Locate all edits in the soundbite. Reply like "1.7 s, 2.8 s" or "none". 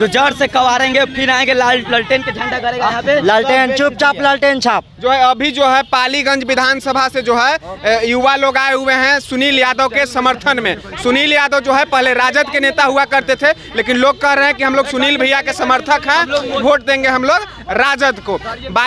none